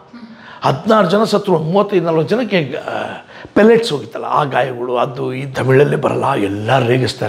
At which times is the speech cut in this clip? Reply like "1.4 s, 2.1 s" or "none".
5.4 s